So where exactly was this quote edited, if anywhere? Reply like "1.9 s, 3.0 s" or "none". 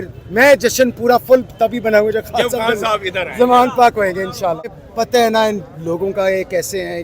4.8 s

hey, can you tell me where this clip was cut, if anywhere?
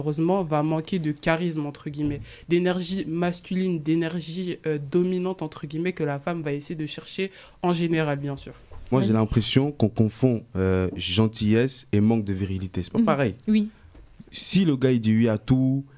8.9 s

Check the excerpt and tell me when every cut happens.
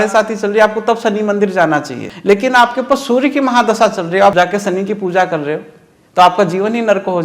2.1 s, 4.3 s

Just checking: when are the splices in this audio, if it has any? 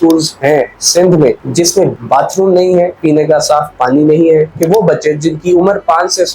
1.9 s, 4.5 s

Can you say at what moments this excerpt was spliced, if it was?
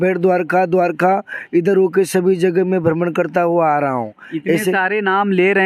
none

